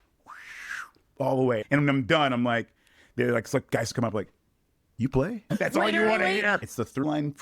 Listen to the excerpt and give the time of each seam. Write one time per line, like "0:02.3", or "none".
0:01.6
0:05.5
0:06.6